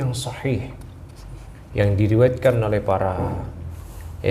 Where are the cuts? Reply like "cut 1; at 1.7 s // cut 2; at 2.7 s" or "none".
none